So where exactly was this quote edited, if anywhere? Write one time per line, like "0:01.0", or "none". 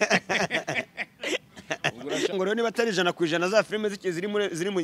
0:02.3